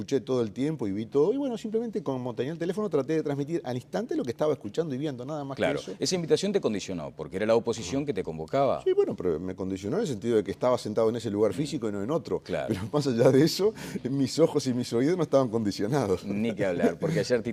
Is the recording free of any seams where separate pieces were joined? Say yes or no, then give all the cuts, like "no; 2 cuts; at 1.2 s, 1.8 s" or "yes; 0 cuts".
yes; 0 cuts